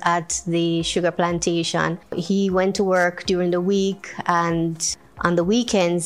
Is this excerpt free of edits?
no; 2 cuts; at 2.2 s, 4.9 s

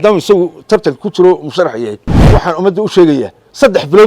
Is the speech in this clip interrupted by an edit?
yes; 1 cut; at 2.1 s

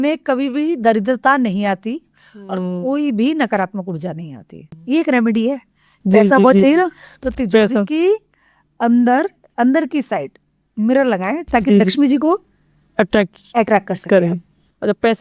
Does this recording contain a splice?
yes; 1 cut; at 4.7 s

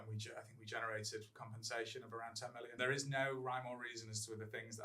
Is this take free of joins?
no; 1 cut; at 2.7 s

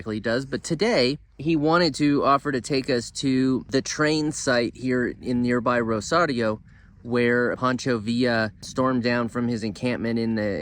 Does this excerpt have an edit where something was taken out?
yes; 4 cuts; at 1.3 s, 3.7 s, 7.6 s, 8.7 s

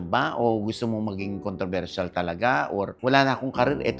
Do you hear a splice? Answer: yes; 1 cut; at 3.0 s

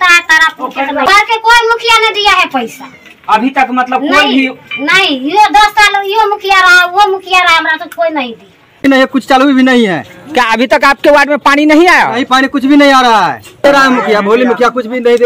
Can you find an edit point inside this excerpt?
yes; 3 cuts; at 1.1 s, 8.8 s, 13.6 s

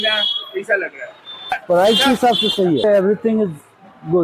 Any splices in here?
yes; 2 cuts; at 1.6 s, 2.8 s

